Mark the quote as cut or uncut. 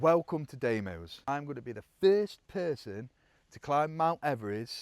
cut